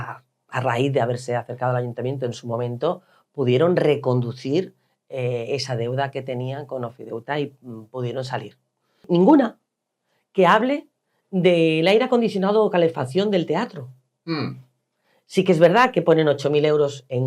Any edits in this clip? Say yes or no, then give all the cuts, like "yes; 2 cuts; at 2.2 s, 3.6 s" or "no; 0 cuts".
yes; 2 cuts; at 9.0 s, 15.2 s